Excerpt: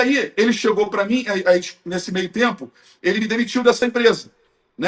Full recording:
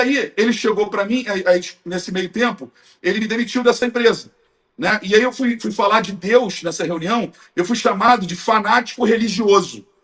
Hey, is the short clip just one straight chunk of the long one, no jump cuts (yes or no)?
yes